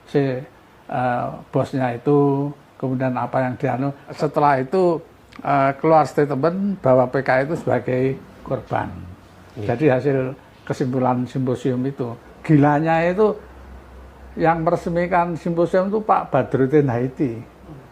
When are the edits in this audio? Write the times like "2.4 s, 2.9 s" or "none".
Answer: 4.0 s, 12.3 s